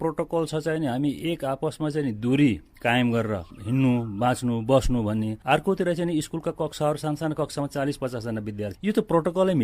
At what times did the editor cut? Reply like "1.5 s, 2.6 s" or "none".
3.5 s, 5.4 s, 8.7 s